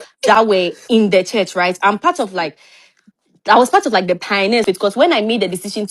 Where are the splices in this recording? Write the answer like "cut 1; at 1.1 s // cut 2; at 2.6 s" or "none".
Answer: cut 1; at 4.6 s